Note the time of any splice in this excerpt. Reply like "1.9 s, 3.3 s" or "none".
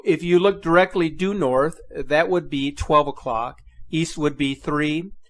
4.1 s